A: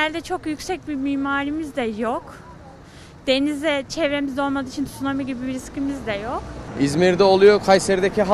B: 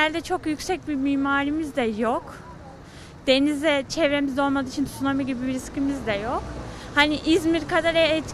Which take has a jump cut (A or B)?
A